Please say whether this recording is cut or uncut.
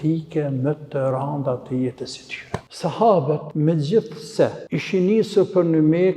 cut